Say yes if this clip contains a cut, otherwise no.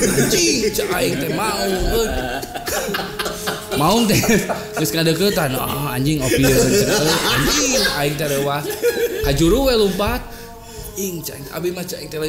no